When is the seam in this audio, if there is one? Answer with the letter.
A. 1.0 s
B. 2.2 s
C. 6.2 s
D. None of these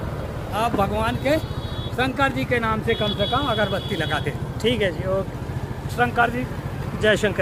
D